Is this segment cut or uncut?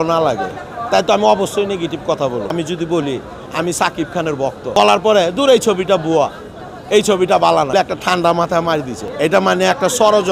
cut